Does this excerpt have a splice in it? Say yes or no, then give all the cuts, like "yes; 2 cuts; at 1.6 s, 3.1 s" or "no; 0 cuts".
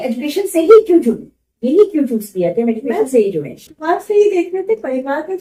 no; 0 cuts